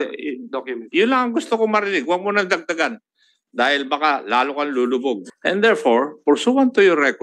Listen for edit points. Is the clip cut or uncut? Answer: cut